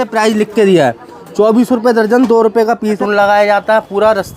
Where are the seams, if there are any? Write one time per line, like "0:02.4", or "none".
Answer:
0:03.0